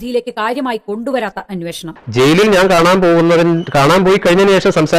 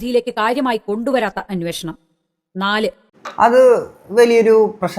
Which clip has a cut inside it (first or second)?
first